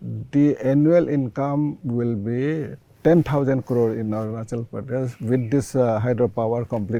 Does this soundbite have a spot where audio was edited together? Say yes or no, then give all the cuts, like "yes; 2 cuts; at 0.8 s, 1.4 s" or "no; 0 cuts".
no; 0 cuts